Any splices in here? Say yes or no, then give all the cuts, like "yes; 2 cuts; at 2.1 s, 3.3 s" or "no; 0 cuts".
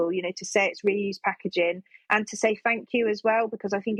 no; 0 cuts